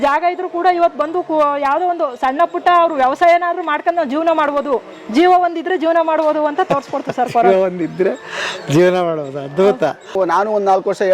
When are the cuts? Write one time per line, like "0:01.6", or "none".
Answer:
0:10.1

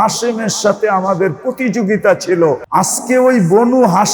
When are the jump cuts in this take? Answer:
0:02.6

